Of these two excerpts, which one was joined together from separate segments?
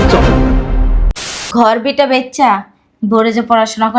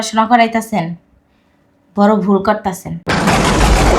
first; 1 cut; at 1.4 s

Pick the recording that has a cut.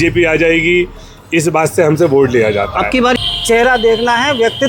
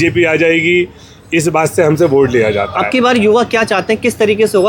first; 1 cut; at 3.2 s

